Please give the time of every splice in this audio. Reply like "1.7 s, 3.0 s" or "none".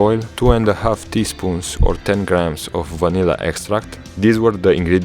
4.0 s

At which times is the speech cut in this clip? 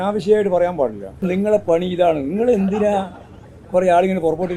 1.2 s

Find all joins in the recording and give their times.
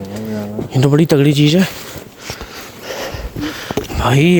none

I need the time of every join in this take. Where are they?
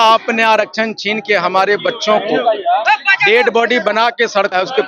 none

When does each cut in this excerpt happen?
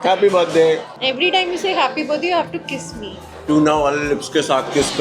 0.9 s, 3.3 s

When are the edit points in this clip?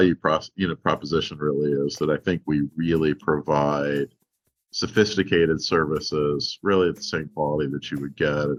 none

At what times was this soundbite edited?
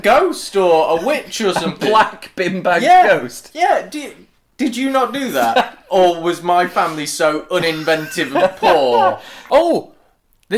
9.4 s

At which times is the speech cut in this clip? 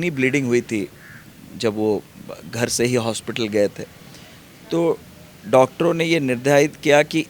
none

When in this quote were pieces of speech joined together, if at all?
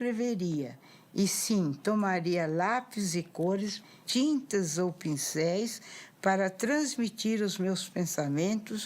3.9 s

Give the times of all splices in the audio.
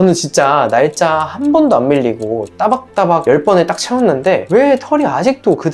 none

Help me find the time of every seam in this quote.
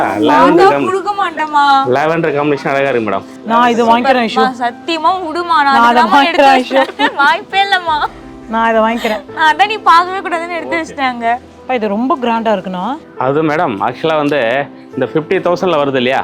3.3 s, 11.5 s

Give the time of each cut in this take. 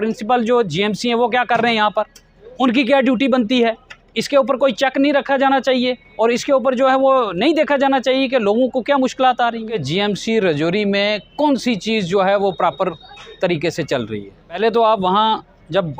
9.6 s, 14.6 s

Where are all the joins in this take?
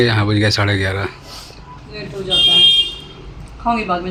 none

